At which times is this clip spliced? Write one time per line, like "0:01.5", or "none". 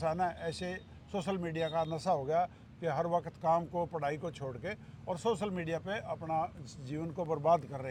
none